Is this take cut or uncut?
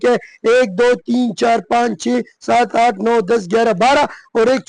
uncut